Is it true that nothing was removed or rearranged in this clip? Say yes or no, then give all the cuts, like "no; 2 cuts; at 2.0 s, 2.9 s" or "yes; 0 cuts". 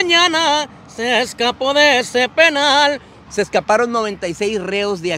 no; 1 cut; at 3.1 s